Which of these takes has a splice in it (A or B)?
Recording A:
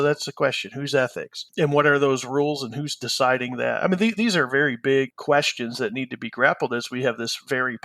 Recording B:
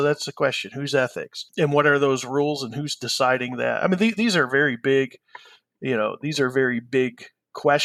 A